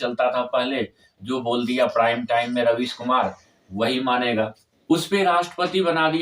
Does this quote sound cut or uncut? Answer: cut